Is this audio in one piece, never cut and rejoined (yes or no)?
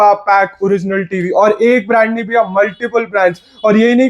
yes